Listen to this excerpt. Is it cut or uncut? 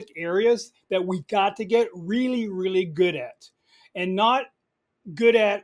uncut